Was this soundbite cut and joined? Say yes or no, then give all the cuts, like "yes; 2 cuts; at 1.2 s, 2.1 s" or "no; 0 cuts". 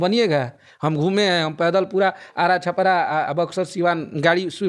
no; 0 cuts